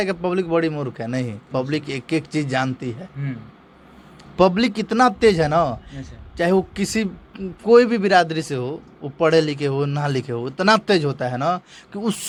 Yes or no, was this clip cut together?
no